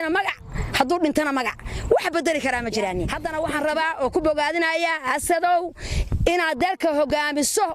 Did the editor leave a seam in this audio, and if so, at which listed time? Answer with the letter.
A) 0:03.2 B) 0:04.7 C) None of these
A